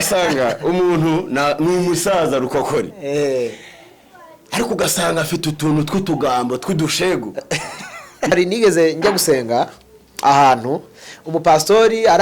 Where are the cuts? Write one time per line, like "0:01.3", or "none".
0:08.3